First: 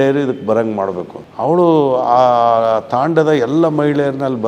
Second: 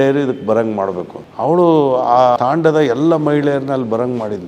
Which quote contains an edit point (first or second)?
second